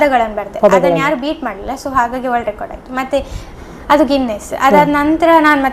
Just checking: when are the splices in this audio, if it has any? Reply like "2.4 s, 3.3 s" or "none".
3.5 s